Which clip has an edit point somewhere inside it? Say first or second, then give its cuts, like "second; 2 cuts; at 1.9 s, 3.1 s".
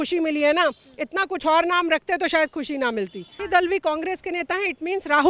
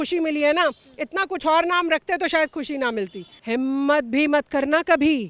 second; 1 cut; at 3.3 s